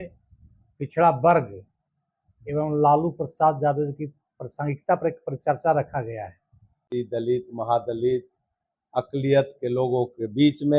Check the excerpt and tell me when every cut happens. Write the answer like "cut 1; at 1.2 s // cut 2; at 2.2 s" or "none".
cut 1; at 6.8 s